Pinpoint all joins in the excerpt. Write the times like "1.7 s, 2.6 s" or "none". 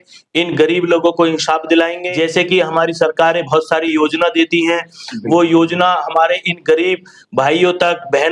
2.0 s